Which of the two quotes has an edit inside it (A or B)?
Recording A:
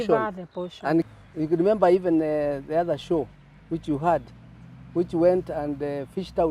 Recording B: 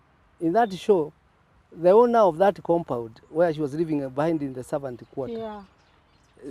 A